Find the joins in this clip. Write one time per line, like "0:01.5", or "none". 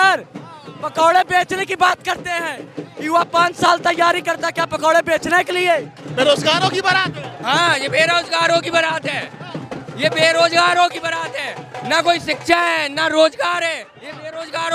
0:06.1